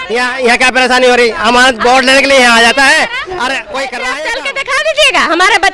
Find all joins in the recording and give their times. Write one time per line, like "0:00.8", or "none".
0:04.1